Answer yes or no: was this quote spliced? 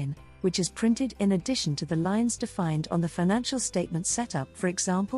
no